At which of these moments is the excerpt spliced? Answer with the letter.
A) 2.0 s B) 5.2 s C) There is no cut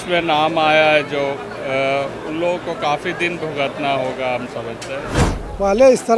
B